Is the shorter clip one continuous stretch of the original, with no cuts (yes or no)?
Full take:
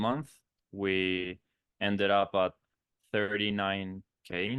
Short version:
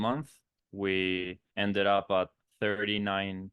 no